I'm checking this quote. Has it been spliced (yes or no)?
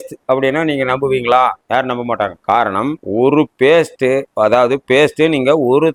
no